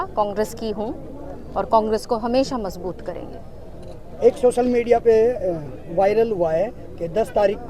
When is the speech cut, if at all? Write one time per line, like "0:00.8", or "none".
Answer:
none